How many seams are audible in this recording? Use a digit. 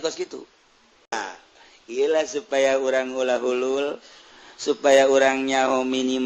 1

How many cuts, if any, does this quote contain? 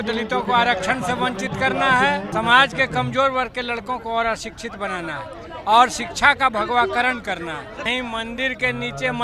2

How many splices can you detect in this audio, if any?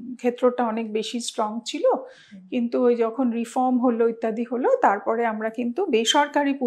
0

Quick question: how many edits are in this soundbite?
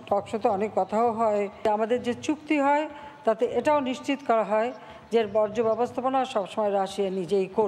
1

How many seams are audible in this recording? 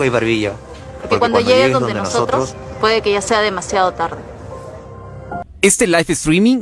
1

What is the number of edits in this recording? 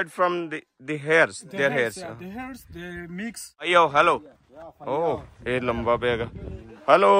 1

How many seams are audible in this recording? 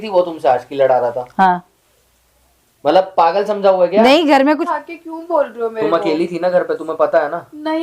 1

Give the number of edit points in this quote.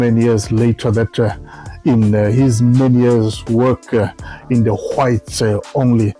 0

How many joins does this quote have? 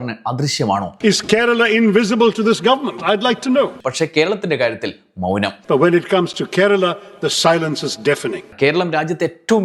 4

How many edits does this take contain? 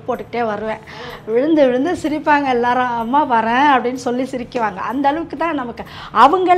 0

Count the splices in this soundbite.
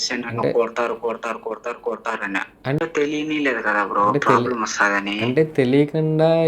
1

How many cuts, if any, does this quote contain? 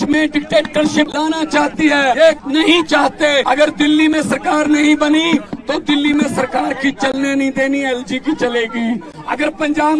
3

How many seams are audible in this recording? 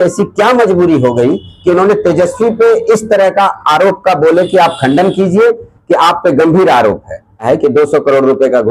1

